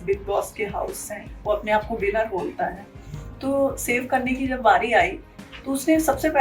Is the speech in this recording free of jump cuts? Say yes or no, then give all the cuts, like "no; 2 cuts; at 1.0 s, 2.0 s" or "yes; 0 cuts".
yes; 0 cuts